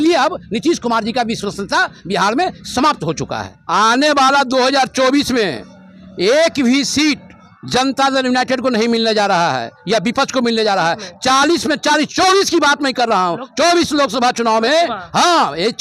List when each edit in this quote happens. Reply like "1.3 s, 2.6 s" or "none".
3.5 s